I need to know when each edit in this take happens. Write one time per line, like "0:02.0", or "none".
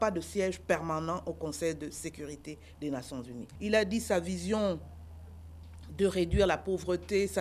0:03.4